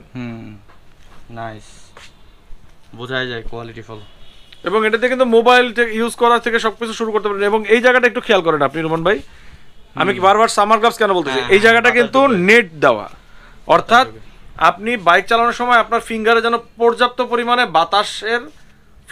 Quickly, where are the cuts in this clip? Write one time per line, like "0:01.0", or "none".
none